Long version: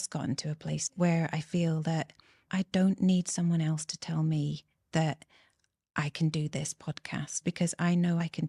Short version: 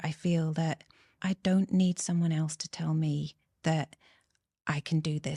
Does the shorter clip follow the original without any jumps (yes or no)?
yes